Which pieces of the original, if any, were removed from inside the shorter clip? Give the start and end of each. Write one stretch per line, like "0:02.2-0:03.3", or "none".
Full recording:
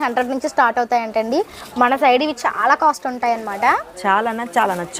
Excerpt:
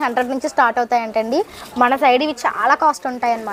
none